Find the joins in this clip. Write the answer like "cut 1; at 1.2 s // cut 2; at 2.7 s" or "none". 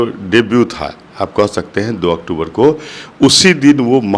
none